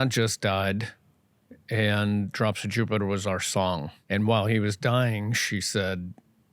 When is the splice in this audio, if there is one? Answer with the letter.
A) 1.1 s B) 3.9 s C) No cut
B